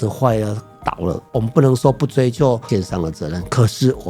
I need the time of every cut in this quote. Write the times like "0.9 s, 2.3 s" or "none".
1.2 s, 2.6 s